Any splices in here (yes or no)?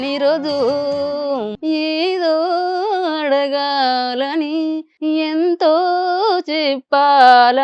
yes